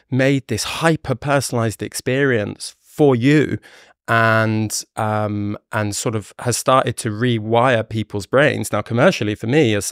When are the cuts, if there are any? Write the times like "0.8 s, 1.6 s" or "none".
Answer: none